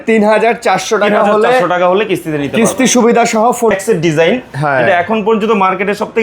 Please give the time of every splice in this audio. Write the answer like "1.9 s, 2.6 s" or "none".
3.7 s